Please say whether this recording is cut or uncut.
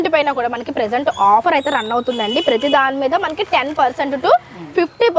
uncut